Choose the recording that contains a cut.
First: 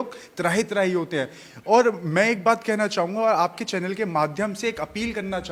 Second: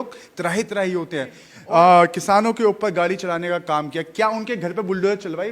second; 1 cut; at 1.5 s

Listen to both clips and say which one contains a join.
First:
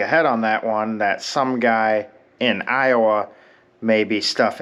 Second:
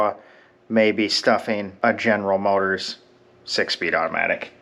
first; 1 cut; at 2.2 s

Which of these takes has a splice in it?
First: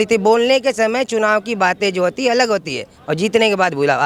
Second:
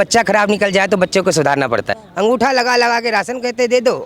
second; 1 cut; at 2.0 s

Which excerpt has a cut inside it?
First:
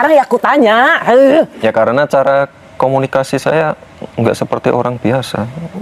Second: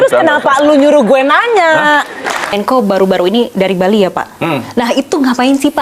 second; 1 cut; at 2.5 s

